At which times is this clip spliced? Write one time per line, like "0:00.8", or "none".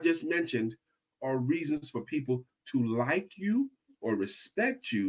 0:01.1